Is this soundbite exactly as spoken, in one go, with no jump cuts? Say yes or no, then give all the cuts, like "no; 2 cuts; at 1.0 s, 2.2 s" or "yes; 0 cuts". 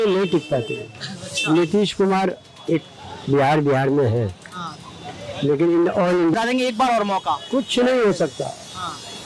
no; 1 cut; at 6.3 s